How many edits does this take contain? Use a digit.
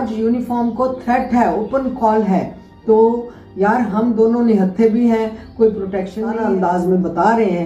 1